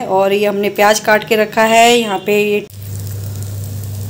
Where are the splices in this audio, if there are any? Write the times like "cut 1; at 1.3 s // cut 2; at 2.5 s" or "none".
cut 1; at 2.7 s